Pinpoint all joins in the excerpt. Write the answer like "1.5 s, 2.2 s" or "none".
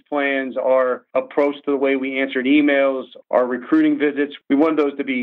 1.0 s, 3.1 s, 4.4 s